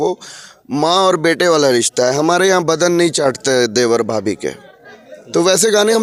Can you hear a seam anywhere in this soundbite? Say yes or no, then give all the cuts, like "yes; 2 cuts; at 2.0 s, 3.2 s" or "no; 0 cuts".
no; 0 cuts